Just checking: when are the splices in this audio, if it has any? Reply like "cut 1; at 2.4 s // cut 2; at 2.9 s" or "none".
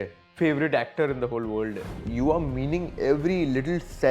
cut 1; at 2.0 s